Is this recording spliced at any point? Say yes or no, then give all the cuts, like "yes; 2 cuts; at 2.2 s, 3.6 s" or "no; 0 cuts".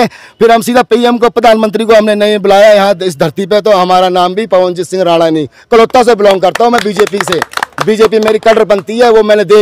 no; 0 cuts